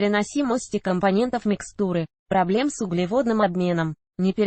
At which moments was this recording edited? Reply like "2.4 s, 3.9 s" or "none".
none

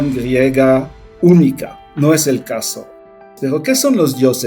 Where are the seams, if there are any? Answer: 1.0 s, 3.1 s

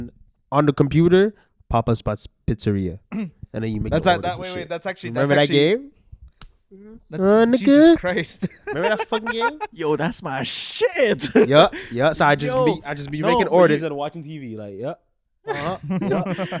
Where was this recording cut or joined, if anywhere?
none

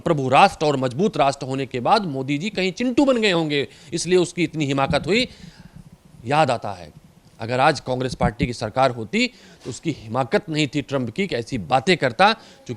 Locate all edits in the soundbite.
none

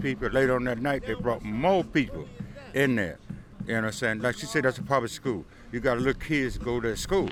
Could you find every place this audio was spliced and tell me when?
none

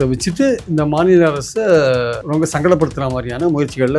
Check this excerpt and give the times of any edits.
2.2 s

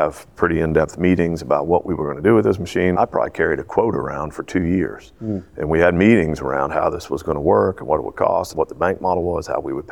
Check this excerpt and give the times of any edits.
3.0 s, 8.5 s

